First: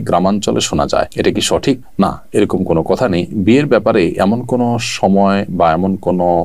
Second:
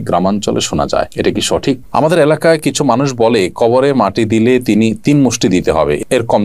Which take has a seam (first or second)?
second